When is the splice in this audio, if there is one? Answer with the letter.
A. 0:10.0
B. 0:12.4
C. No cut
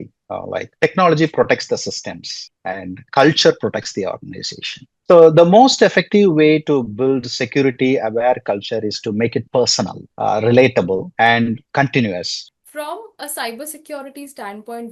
B